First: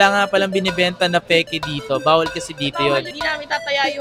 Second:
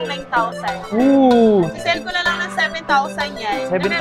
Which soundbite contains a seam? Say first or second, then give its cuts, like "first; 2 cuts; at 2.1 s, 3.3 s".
second; 1 cut; at 1.7 s